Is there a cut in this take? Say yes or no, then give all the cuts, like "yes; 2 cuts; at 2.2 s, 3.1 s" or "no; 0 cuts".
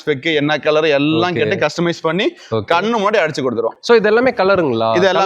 no; 0 cuts